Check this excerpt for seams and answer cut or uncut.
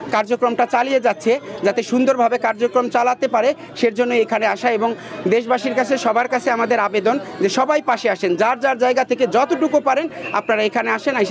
uncut